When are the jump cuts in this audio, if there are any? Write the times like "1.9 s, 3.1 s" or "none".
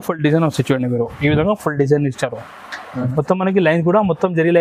2.9 s